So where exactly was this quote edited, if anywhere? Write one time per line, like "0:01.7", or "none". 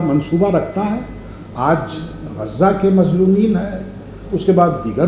none